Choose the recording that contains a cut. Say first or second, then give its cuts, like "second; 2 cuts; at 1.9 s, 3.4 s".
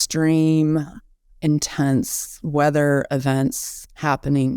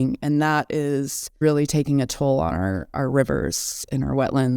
second; 1 cut; at 1.4 s